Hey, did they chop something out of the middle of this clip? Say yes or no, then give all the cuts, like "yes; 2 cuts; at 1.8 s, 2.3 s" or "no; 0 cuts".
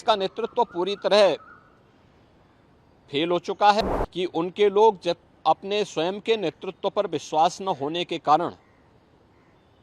yes; 1 cut; at 3.8 s